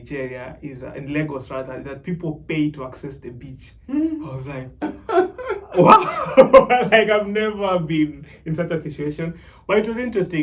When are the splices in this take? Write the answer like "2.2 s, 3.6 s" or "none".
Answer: none